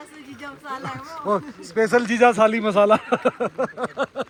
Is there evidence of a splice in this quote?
no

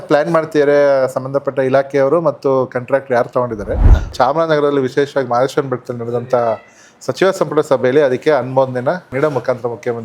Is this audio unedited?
no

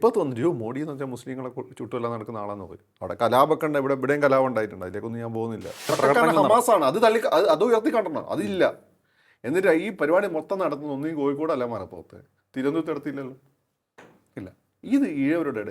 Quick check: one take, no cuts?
no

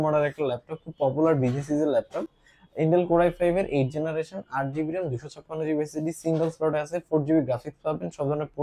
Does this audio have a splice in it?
no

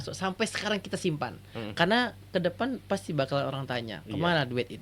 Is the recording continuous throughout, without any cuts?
yes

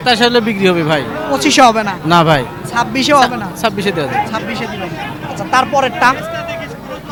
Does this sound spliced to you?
no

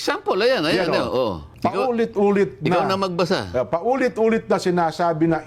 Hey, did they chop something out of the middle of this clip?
yes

